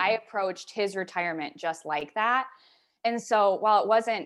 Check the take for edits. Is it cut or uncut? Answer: uncut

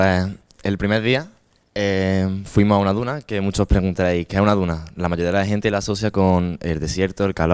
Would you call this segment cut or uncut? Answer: uncut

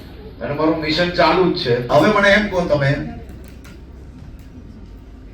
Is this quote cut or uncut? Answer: cut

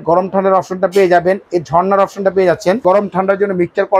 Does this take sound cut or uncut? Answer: cut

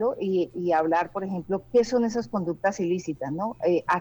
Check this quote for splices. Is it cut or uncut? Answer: uncut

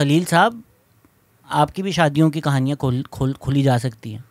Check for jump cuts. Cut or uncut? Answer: uncut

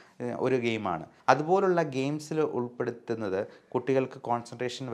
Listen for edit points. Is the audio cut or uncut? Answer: cut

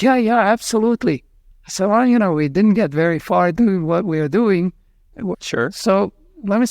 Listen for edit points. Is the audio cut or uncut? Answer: cut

